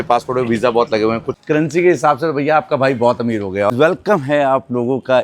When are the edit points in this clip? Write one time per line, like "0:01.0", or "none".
0:01.3
0:03.7